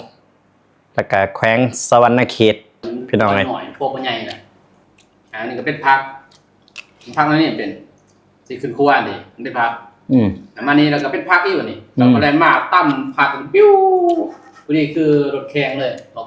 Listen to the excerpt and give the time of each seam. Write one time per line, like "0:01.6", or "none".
0:03.5